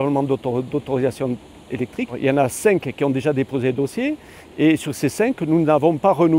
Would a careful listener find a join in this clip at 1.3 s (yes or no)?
no